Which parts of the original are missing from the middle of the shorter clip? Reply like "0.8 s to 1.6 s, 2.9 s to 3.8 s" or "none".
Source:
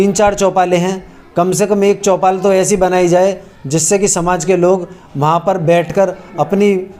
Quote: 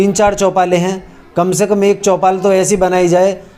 none